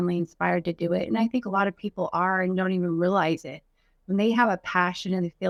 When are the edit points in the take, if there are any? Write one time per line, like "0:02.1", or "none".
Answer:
none